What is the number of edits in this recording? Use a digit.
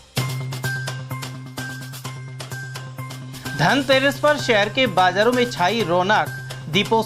1